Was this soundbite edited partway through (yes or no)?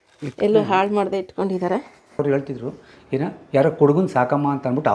yes